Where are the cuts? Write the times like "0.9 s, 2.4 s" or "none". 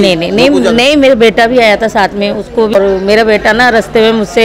2.8 s